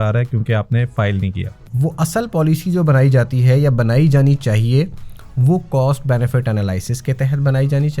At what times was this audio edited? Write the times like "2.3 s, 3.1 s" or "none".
1.7 s

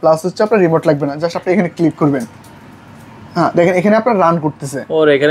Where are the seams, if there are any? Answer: none

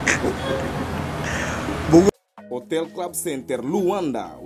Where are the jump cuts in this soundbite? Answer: 2.1 s

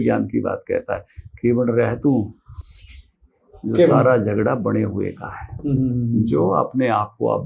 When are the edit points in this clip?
none

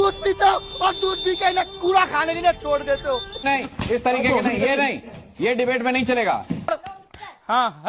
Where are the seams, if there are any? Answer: 3.4 s, 6.8 s

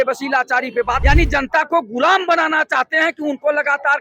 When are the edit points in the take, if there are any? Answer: 1.0 s

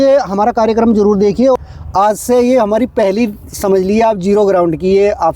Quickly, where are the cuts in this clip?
1.6 s

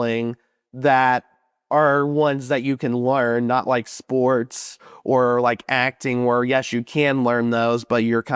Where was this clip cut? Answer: none

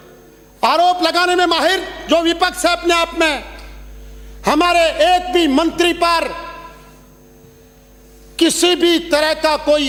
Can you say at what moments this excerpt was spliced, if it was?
none

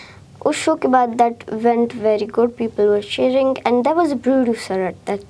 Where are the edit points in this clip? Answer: none

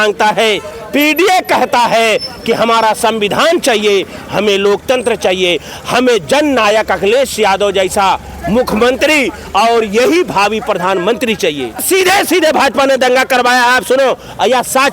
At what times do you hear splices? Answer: 11.8 s

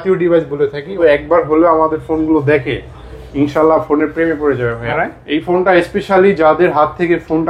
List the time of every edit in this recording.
0.9 s, 4.9 s

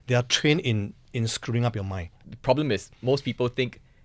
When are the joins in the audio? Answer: 2.1 s

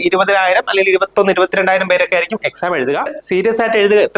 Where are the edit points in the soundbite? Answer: 3.2 s

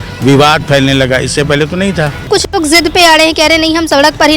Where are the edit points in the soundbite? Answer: 2.3 s

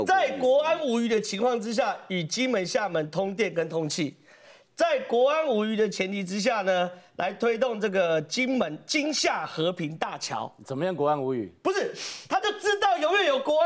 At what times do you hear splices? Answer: none

